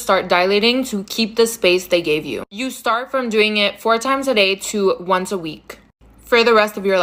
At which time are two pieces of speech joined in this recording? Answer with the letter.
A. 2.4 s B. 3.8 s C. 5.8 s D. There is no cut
D